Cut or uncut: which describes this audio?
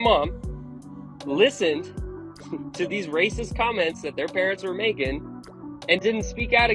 uncut